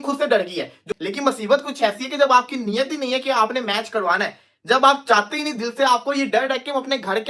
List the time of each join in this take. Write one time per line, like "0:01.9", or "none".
0:00.9